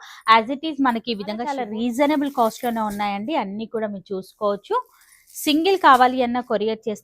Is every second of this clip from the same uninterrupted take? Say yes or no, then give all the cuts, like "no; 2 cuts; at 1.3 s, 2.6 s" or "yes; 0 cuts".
no; 1 cut; at 1.6 s